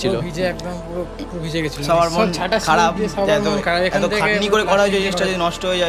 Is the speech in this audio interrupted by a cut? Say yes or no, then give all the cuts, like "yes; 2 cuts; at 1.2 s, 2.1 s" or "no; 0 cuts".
no; 0 cuts